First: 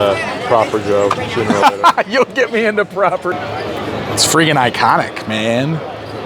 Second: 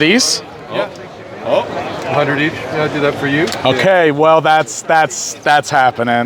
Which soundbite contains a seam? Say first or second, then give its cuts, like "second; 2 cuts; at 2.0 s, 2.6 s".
first; 1 cut; at 3.3 s